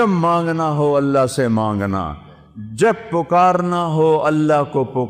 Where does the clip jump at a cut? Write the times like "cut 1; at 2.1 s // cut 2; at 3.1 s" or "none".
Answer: none